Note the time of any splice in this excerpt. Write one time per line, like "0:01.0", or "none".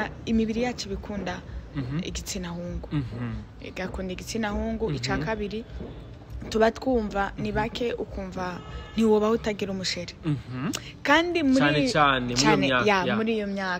none